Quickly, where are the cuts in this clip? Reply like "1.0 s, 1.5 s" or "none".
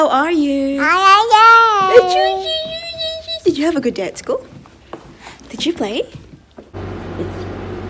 6.7 s